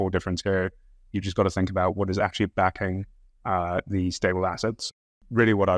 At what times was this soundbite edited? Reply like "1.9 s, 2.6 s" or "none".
4.8 s